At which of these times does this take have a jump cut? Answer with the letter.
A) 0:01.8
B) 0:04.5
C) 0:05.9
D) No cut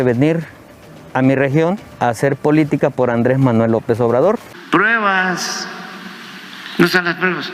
B